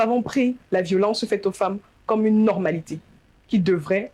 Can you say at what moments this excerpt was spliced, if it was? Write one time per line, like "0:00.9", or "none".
none